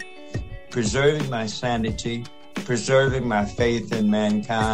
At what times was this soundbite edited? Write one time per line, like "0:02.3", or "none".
0:02.5